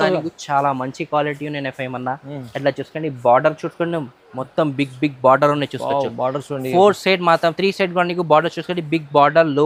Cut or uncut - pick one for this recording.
uncut